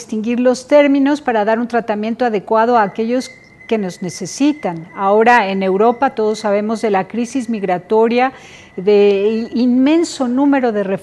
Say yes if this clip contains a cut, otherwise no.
no